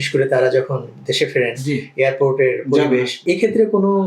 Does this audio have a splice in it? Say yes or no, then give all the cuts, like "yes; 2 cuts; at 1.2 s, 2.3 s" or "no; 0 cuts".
yes; 1 cut; at 3.1 s